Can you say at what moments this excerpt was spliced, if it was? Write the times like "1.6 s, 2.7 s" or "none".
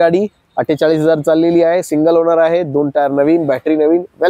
none